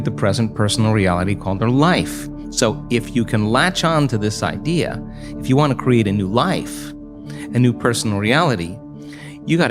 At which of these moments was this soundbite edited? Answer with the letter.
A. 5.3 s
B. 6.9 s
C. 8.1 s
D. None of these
D